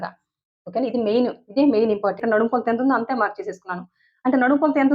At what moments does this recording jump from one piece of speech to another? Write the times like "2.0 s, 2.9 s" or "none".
2.2 s